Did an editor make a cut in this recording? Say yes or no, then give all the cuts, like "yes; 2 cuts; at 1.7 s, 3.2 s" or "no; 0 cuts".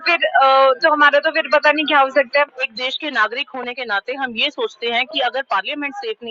yes; 1 cut; at 2.7 s